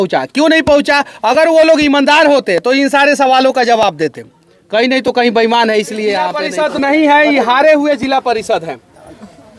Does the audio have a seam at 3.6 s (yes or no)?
no